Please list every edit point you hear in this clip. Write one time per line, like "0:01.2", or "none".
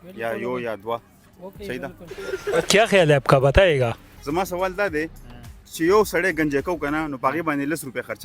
0:04.1

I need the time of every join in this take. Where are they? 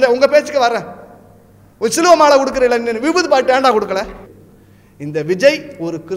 0:04.2

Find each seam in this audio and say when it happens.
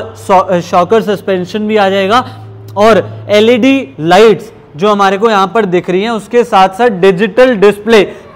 none

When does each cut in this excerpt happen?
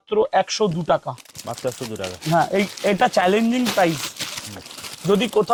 none

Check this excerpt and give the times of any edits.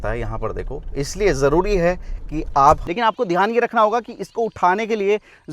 0:02.8

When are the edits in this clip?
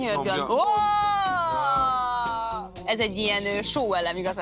0:02.8

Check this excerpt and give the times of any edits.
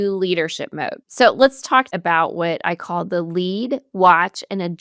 0:01.0
0:01.9

